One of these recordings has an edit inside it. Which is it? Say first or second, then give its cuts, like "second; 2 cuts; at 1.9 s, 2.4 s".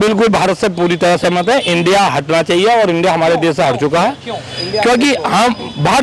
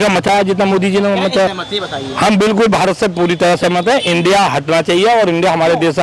second; 1 cut; at 1.5 s